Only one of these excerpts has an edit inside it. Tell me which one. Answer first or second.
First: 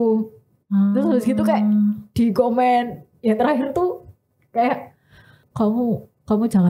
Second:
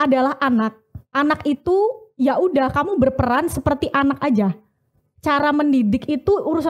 first